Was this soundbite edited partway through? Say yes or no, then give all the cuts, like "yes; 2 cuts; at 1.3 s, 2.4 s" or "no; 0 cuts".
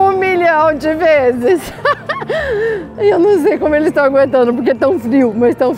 no; 0 cuts